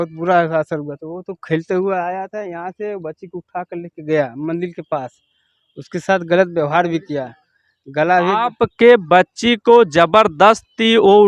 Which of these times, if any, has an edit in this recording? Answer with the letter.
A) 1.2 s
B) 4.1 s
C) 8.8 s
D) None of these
D